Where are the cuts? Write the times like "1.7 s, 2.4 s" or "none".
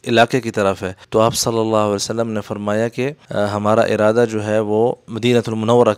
0.9 s, 3.2 s, 5.1 s